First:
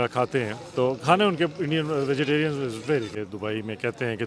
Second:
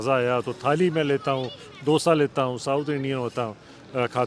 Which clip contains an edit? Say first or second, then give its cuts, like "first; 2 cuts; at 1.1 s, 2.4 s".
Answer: first; 1 cut; at 3.1 s